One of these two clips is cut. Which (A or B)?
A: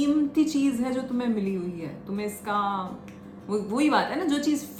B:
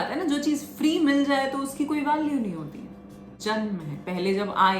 B